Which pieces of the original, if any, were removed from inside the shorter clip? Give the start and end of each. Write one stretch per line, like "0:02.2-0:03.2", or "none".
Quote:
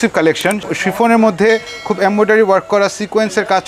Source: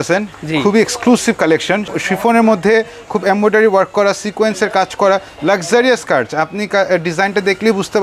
none